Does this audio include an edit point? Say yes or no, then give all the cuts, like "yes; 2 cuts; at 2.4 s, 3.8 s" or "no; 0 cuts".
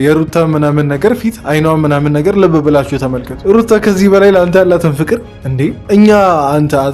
yes; 1 cut; at 3.3 s